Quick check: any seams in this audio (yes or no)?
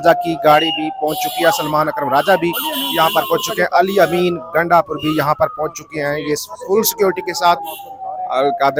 no